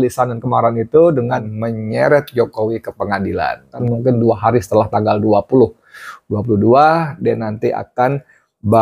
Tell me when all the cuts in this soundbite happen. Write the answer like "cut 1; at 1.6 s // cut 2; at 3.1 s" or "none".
cut 1; at 1.5 s // cut 2; at 3.8 s

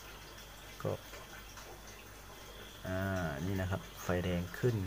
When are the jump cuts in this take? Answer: cut 1; at 0.9 s

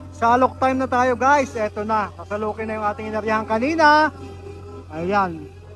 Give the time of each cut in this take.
none

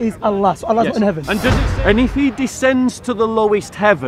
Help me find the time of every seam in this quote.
cut 1; at 1.6 s

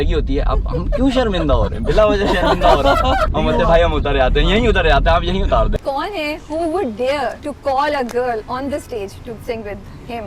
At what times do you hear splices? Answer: cut 1; at 3.3 s // cut 2; at 5.7 s // cut 3; at 7.5 s

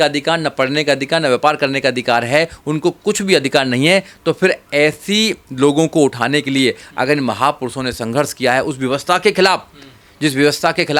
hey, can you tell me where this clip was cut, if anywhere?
none

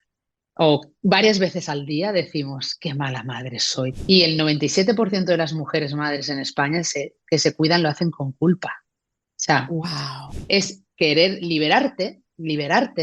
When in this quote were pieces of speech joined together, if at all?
cut 1; at 3.9 s // cut 2; at 10.2 s

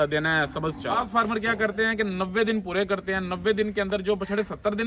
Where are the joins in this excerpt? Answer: cut 1; at 1.0 s

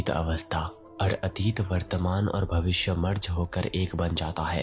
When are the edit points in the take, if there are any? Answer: cut 1; at 1.1 s

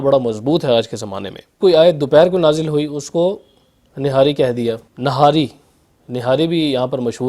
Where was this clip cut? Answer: cut 1; at 1.6 s // cut 2; at 4.9 s

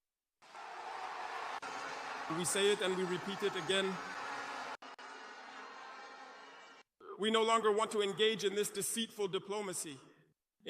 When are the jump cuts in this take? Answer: cut 1; at 4.8 s

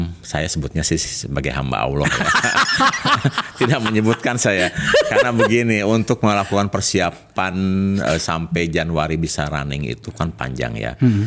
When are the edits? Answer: none

